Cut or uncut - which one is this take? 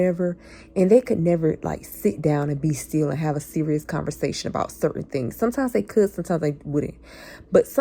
uncut